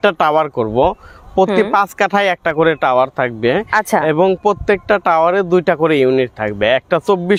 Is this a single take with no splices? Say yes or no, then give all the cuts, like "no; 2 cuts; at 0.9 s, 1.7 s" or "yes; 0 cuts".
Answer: yes; 0 cuts